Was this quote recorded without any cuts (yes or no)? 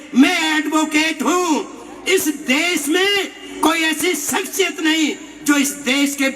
no